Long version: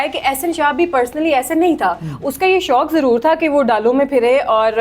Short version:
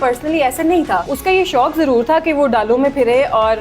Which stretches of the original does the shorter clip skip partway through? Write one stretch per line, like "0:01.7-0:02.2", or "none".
0:02.0-0:02.3